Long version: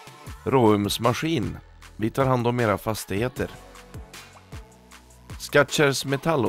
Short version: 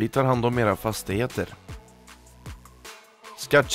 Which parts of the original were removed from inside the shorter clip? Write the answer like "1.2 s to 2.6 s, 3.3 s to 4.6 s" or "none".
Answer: none